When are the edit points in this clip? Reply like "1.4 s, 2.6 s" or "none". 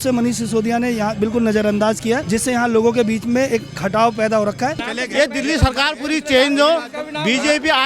2.2 s, 4.9 s